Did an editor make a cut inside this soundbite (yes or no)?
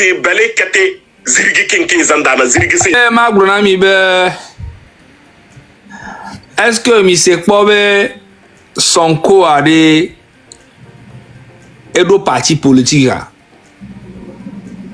yes